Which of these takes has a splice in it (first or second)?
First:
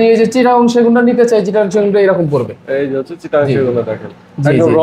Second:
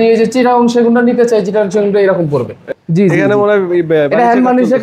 second